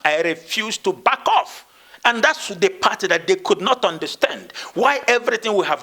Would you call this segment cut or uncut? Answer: uncut